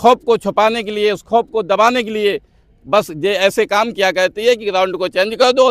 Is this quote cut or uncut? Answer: uncut